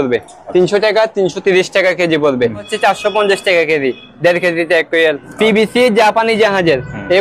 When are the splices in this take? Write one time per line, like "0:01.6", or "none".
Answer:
0:02.7
0:05.3